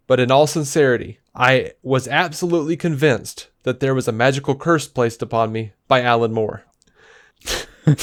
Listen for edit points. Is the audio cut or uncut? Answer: uncut